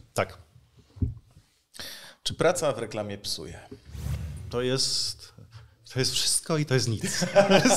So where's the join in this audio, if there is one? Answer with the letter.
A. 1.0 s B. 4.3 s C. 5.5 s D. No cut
B